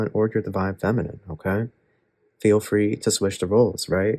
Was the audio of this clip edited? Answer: no; 0 cuts

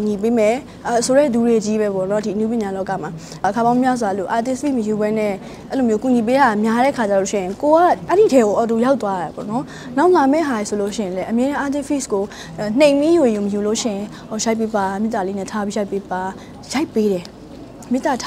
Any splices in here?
yes; 2 cuts; at 3.5 s, 8.0 s

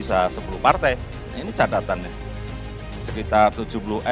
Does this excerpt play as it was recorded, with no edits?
no; 1 cut; at 1.3 s

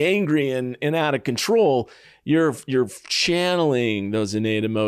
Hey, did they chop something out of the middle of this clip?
no; 0 cuts

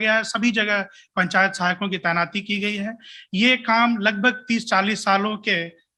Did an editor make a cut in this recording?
no; 0 cuts

